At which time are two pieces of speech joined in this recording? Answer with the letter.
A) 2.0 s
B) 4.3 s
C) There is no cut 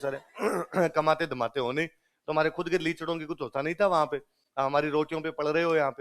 C